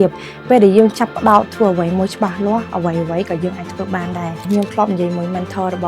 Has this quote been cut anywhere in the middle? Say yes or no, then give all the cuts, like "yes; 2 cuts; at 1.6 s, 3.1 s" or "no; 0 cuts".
yes; 1 cut; at 4.4 s